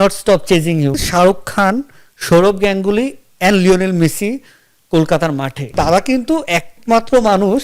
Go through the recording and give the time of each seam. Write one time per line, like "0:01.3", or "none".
0:01.0
0:05.7